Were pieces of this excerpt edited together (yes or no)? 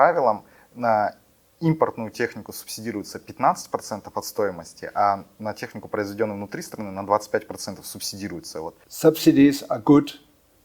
yes